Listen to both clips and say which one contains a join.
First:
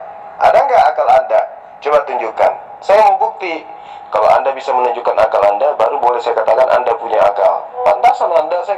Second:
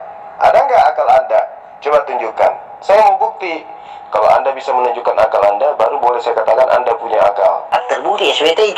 second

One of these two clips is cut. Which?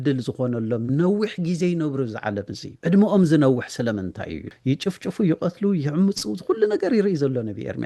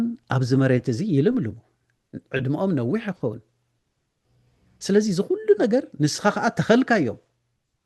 first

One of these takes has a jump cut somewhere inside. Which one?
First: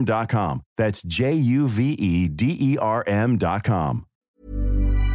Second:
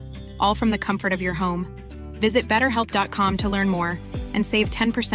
first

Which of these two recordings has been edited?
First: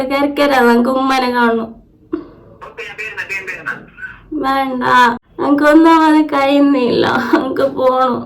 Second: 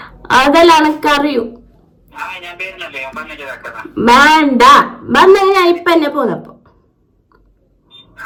first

